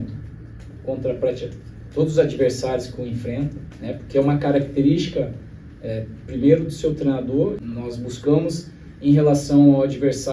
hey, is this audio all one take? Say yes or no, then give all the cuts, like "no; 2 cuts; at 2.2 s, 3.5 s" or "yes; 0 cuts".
no; 1 cut; at 7.6 s